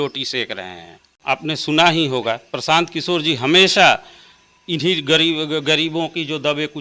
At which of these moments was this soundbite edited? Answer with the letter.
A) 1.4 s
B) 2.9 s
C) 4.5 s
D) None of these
A